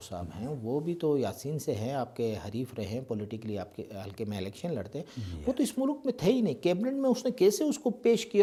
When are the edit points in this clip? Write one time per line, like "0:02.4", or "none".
none